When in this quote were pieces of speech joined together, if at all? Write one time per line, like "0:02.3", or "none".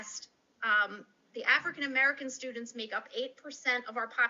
none